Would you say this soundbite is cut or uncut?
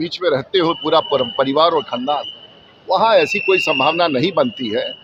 uncut